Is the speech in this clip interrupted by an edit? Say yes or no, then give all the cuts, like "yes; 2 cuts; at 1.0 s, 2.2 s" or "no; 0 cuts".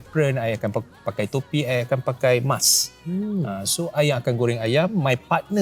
no; 0 cuts